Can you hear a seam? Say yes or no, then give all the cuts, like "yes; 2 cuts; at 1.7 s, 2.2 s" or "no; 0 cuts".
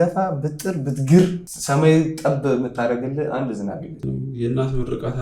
yes; 2 cuts; at 1.5 s, 4.0 s